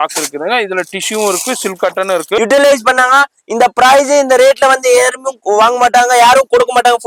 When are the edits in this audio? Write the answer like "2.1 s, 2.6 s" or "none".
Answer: 2.4 s